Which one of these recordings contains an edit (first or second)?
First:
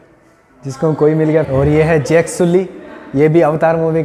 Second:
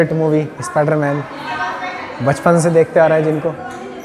first